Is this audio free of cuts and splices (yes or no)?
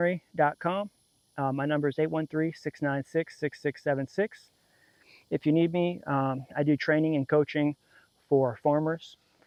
yes